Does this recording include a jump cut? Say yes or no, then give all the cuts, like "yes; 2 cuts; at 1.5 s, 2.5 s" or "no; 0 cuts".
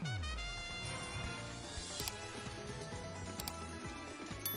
no; 0 cuts